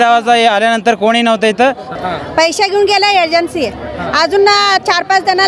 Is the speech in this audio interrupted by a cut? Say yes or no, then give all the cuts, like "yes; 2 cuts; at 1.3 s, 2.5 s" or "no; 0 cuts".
yes; 1 cut; at 1.9 s